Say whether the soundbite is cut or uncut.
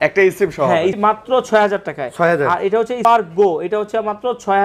cut